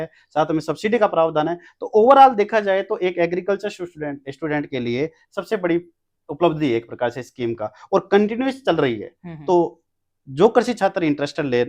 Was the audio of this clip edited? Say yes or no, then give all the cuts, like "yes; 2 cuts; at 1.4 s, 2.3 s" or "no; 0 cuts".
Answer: no; 0 cuts